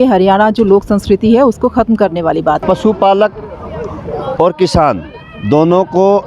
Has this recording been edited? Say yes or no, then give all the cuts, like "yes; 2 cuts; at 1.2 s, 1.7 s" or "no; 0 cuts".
yes; 1 cut; at 2.6 s